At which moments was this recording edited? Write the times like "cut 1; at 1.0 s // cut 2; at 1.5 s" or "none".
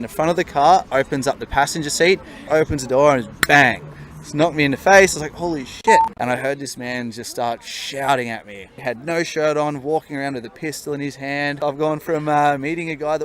cut 1; at 2.5 s // cut 2; at 6.2 s // cut 3; at 8.7 s // cut 4; at 11.5 s